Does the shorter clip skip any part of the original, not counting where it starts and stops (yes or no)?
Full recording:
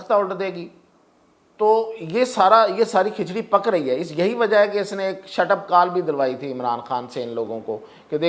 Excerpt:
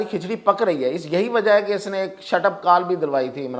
no